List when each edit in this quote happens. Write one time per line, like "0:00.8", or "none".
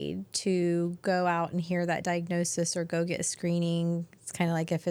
none